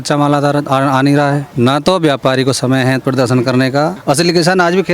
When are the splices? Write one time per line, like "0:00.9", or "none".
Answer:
0:01.5
0:04.0